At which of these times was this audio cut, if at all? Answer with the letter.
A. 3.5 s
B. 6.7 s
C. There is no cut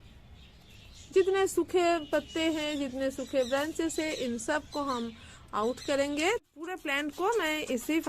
B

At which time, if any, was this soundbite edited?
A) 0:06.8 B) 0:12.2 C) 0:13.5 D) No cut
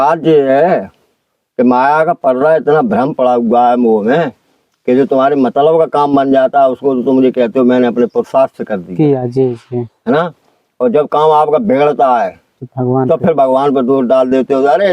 D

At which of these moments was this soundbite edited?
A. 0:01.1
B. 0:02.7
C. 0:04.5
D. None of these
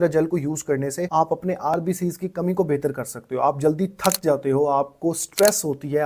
A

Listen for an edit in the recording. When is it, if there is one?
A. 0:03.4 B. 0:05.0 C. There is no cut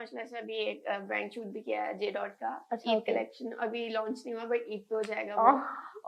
C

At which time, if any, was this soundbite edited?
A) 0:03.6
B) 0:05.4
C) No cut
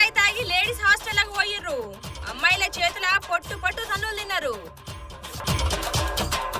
B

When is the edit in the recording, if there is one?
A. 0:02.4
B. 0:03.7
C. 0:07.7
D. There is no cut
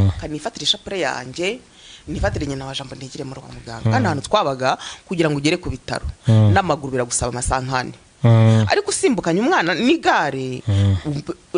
B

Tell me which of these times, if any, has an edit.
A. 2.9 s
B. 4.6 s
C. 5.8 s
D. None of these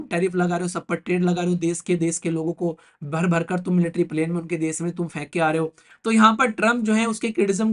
C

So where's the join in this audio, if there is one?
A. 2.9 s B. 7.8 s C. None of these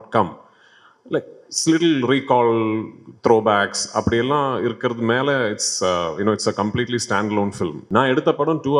B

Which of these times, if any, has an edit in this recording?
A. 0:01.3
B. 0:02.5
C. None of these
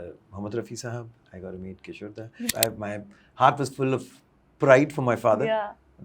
B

